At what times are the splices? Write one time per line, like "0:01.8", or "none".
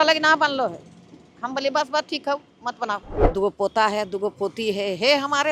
0:03.1